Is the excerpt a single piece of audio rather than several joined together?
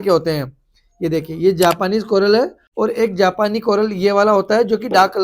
no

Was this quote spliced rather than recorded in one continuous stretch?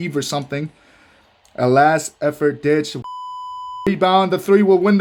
no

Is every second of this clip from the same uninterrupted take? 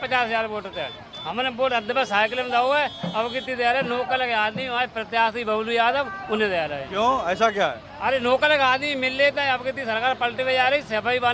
yes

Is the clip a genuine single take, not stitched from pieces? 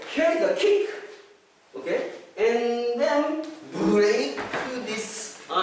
yes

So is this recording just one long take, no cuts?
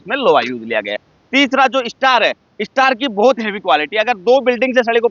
yes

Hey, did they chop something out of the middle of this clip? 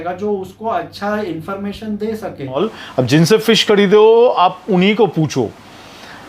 yes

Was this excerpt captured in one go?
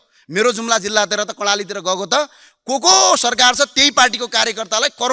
yes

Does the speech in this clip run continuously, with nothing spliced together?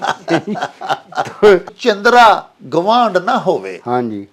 no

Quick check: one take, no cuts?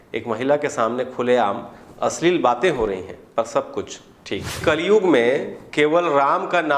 no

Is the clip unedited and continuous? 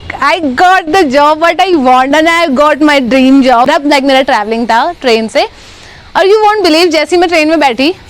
no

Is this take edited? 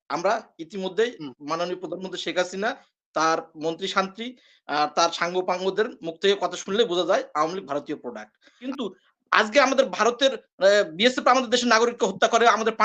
yes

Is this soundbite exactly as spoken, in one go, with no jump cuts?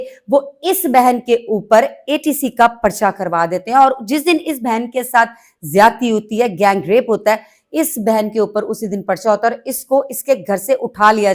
yes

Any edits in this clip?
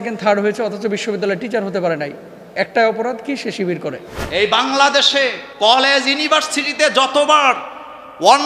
yes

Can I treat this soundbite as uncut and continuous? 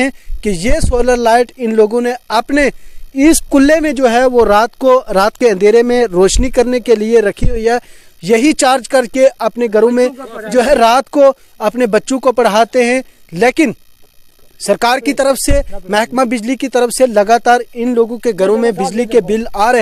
yes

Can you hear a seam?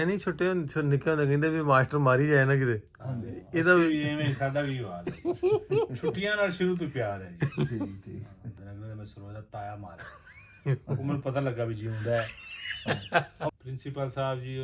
yes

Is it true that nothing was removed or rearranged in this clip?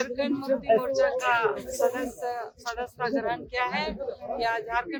yes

